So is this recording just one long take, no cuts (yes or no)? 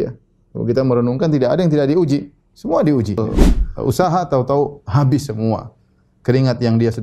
no